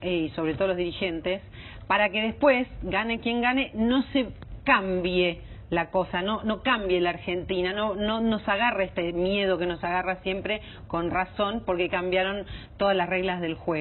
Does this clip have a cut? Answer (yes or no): no